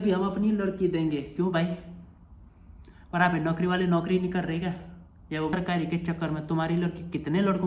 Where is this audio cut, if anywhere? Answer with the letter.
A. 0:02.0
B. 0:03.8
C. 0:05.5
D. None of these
C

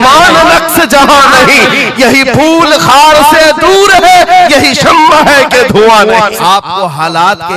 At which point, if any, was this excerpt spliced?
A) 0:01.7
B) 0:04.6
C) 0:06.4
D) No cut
C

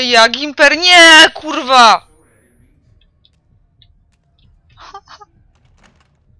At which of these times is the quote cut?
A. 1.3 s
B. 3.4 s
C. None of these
C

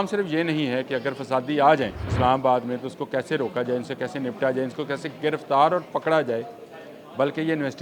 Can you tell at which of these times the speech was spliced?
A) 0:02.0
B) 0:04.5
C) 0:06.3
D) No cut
A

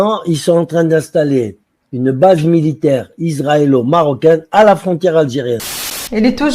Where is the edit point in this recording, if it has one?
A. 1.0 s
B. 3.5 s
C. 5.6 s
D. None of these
C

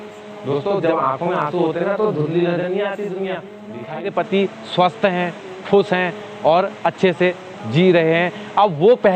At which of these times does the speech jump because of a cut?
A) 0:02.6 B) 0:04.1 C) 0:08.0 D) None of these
B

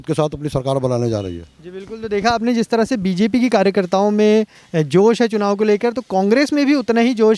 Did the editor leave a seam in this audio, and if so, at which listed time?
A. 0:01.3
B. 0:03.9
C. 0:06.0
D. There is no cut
D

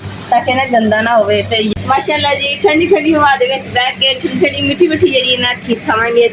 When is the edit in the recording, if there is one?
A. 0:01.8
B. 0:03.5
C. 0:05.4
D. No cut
A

